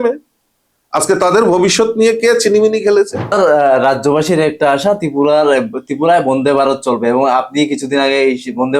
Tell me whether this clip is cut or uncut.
cut